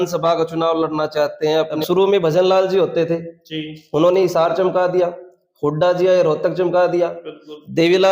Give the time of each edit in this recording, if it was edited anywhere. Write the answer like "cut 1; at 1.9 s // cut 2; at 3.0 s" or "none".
cut 1; at 1.8 s